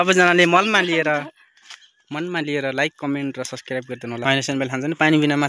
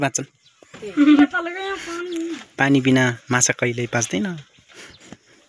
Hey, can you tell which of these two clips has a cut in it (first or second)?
first